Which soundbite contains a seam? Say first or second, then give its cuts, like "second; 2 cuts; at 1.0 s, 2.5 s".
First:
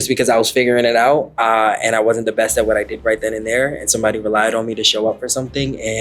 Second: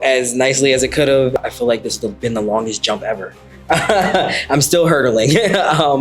second; 1 cut; at 1.4 s